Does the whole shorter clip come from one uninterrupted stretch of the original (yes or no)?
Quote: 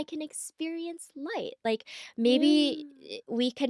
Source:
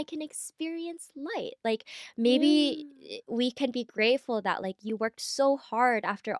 yes